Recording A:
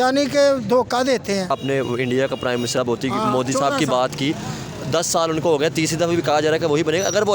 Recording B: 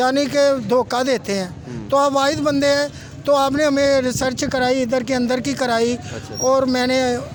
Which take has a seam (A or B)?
A